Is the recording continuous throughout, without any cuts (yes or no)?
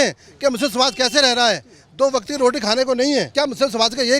no